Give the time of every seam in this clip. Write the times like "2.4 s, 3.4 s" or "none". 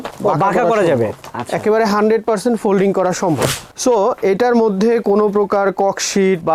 none